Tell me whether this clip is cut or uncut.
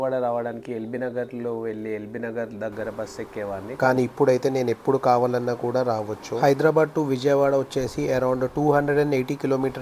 cut